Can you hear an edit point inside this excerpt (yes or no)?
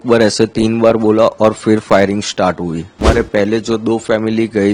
yes